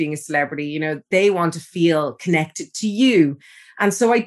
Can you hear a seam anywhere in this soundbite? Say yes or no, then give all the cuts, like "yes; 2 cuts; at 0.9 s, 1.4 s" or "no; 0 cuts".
yes; 1 cut; at 1.0 s